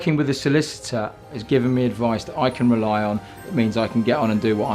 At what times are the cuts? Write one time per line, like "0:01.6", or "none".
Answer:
0:01.3